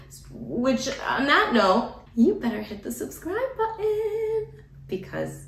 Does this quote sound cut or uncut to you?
cut